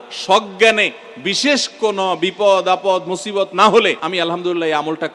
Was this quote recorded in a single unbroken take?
no; 1 cut; at 4.0 s

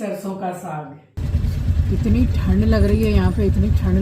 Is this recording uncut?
no; 1 cut; at 1.2 s

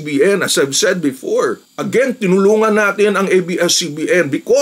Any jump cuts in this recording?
no; 0 cuts

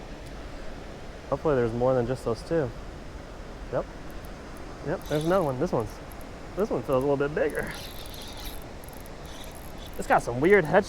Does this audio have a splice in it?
yes; 2 cuts; at 1.3 s, 3.6 s

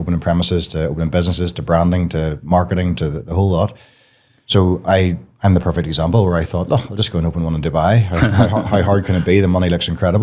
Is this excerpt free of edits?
yes; 0 cuts

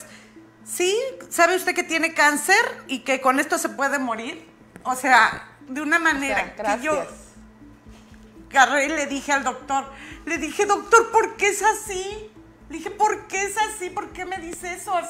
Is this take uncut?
yes; 0 cuts

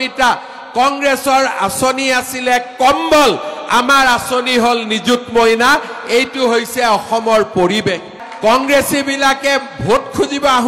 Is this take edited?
no; 0 cuts

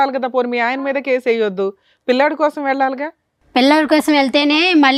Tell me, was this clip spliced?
no; 0 cuts

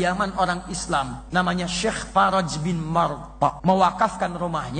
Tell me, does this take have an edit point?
yes; 2 cuts; at 1.2 s, 3.6 s

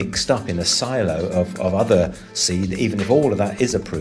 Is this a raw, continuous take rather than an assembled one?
yes; 0 cuts

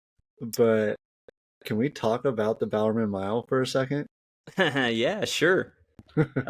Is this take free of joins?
yes; 0 cuts

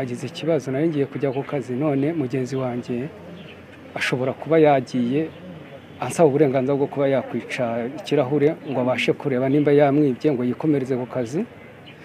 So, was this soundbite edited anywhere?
no; 0 cuts

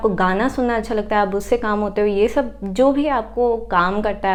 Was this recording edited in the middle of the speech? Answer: no; 0 cuts

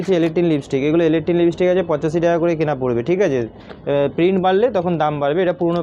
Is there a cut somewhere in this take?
no; 0 cuts

